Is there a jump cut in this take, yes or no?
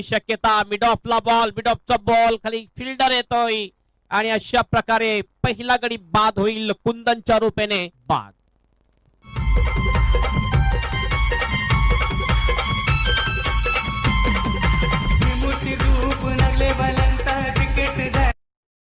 no